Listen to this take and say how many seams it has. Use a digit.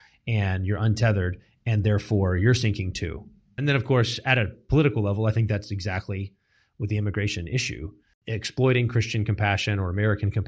2